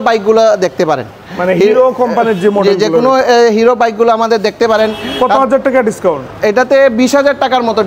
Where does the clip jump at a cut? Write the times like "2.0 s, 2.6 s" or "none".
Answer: 5.0 s